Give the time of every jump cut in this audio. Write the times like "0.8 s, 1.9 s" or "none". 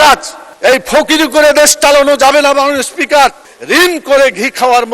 3.5 s